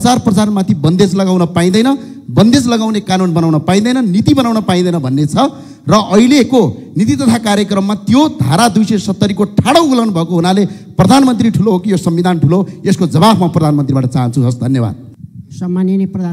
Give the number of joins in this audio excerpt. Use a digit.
0